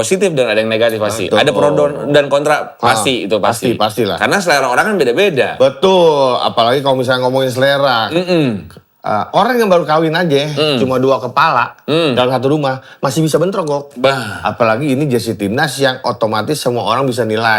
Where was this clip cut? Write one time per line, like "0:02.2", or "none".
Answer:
none